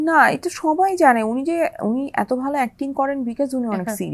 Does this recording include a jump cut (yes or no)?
no